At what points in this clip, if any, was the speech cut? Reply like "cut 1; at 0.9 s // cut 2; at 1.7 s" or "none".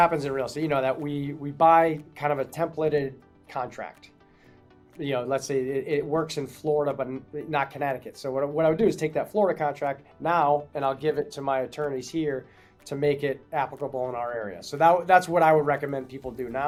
none